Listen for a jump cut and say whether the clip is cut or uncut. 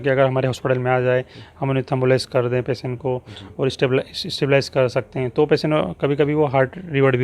uncut